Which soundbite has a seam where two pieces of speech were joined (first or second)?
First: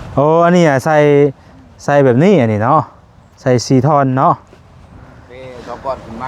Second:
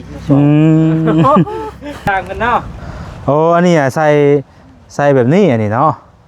second